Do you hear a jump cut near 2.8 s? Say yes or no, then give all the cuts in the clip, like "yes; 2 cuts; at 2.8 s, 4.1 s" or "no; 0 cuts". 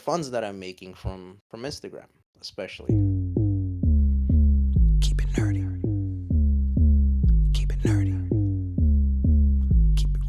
yes; 1 cut; at 2.8 s